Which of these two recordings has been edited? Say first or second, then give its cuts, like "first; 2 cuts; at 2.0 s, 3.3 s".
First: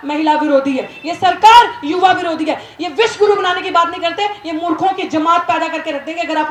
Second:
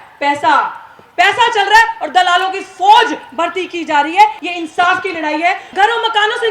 second; 2 cuts; at 4.4 s, 5.6 s